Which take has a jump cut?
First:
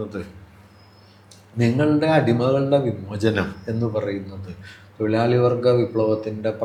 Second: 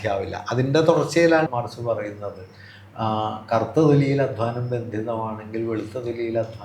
second; 1 cut; at 1.5 s

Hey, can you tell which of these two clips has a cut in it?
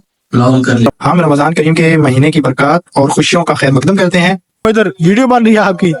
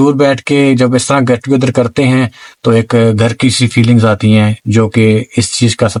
first; 2 cuts; at 0.9 s, 4.6 s

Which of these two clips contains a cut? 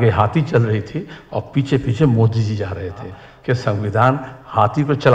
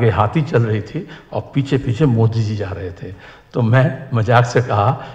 first; 1 cut; at 3.3 s

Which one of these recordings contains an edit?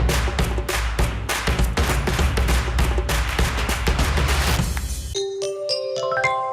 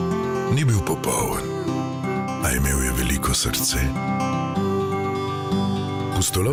first; 1 cut; at 4.9 s

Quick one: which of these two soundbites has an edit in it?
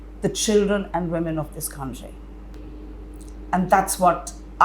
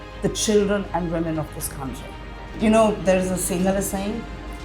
second; 1 cut; at 2.5 s

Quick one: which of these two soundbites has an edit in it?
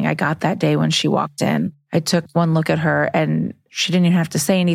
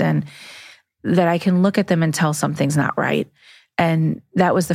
first; 1 cut; at 1.8 s

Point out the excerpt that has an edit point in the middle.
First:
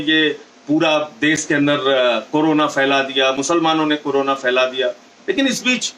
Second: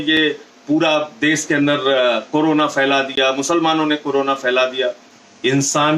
second; 1 cut; at 5.1 s

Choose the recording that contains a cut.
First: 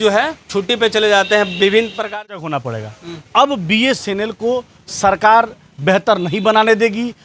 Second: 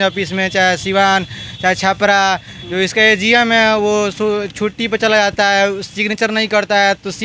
first; 1 cut; at 2.2 s

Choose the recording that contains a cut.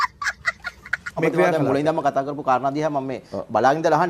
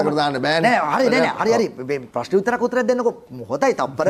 first; 1 cut; at 1.2 s

